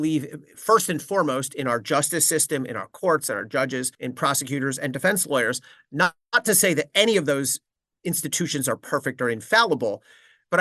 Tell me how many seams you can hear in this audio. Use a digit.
1